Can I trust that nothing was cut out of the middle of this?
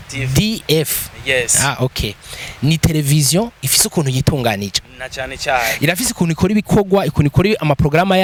yes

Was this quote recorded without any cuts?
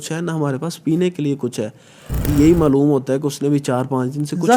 no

